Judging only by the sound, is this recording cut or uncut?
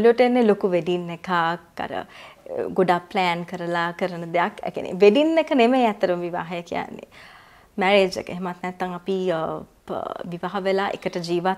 uncut